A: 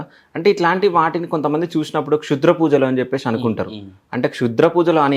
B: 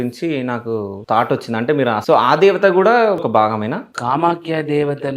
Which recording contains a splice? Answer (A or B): B